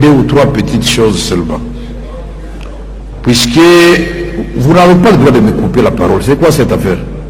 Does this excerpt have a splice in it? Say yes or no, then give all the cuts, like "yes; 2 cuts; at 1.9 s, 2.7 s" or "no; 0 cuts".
no; 0 cuts